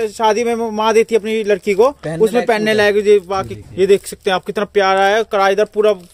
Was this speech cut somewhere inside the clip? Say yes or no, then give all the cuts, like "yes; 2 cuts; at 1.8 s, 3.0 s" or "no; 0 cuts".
yes; 1 cut; at 3.6 s